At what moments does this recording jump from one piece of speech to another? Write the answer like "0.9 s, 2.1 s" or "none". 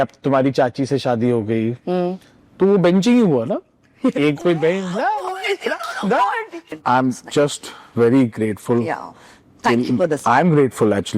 6.6 s